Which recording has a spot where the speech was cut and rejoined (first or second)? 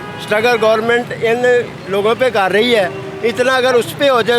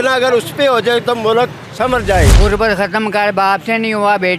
second